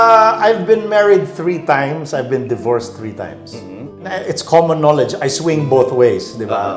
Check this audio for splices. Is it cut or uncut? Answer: cut